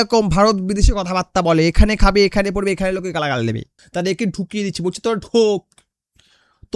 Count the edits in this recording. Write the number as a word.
one